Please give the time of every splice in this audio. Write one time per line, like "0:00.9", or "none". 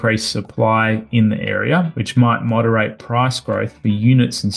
0:02.0